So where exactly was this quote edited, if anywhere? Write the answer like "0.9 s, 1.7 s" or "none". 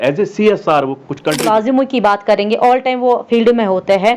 1.4 s

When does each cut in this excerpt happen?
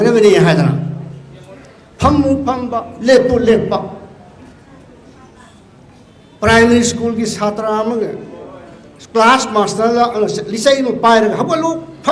none

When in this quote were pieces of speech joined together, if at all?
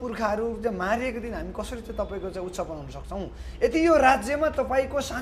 none

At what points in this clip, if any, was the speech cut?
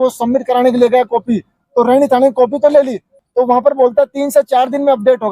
3.1 s

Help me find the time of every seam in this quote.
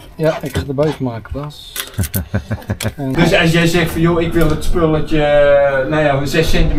3.0 s

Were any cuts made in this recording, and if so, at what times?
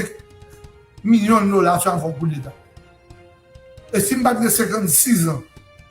2.5 s, 3.9 s

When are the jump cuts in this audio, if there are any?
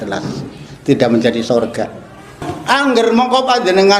2.5 s

